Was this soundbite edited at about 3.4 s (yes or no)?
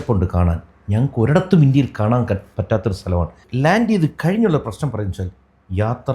yes